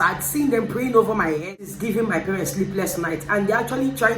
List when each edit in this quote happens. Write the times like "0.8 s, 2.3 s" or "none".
1.6 s